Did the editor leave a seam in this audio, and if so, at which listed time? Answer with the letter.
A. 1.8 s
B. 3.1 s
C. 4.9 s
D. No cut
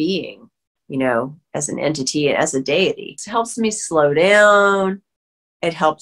B